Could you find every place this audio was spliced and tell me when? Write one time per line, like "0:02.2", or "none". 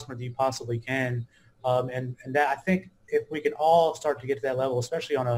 none